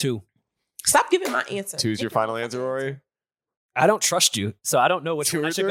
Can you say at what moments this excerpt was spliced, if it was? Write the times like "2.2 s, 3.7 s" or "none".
none